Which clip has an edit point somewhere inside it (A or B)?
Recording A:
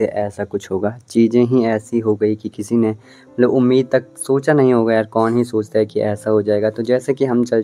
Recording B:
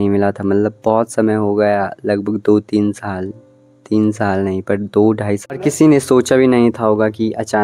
B